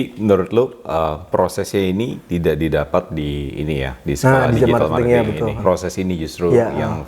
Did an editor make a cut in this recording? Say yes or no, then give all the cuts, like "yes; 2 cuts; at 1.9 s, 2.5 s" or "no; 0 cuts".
yes; 1 cut; at 5.6 s